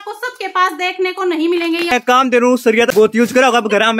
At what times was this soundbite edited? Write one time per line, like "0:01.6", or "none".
0:01.9
0:03.0

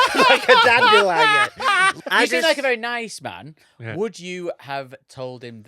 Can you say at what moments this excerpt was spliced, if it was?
0:02.0

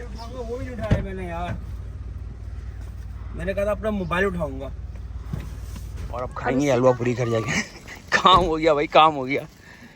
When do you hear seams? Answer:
0:06.5

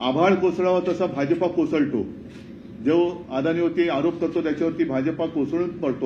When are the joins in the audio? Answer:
none

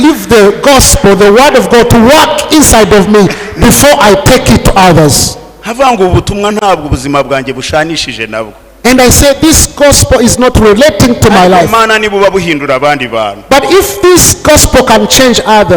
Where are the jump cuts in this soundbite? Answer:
none

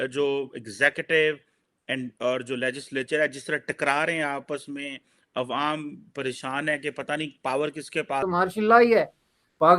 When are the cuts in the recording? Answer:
0:08.2

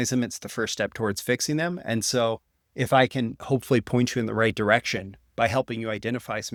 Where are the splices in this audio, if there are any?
none

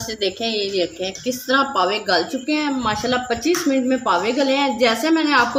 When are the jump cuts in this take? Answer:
none

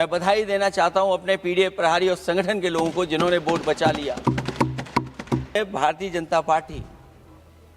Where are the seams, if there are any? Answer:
0:05.6

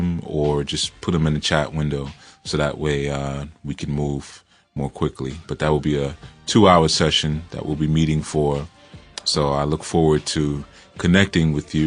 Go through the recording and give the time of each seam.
0:01.7

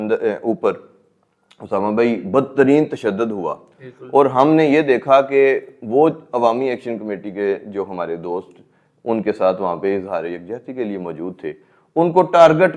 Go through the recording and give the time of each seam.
none

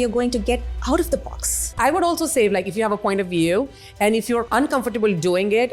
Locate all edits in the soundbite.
0:01.7
0:04.5

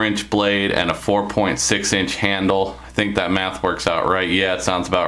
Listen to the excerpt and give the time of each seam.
none

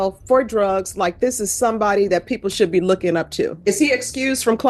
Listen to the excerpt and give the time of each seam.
0:03.6

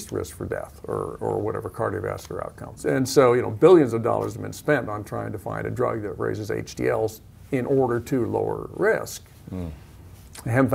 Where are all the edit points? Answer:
0:02.8

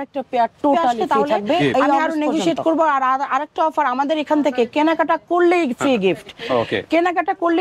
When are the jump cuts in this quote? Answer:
0:02.0

